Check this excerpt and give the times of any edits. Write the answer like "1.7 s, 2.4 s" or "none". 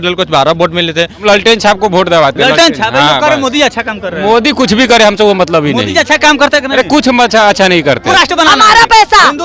1.1 s, 8.1 s